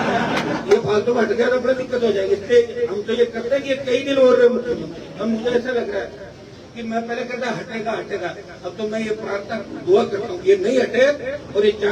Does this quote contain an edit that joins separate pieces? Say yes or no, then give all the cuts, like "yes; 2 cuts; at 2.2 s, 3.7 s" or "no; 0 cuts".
no; 0 cuts